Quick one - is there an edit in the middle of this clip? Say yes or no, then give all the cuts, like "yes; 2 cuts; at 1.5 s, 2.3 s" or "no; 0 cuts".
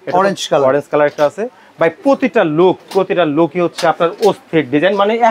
no; 0 cuts